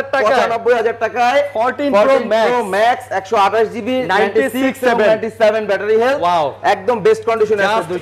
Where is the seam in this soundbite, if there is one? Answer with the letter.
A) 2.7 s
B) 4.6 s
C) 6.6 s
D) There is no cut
D